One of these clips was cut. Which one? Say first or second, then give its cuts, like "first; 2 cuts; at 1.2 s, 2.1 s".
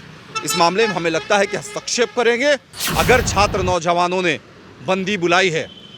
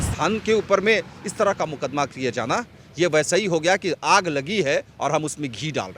first; 1 cut; at 2.8 s